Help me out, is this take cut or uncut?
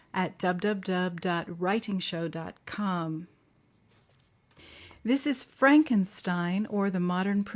cut